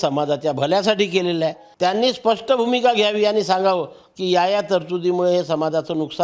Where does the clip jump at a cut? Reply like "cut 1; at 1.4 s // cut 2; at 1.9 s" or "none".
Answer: cut 1; at 1.6 s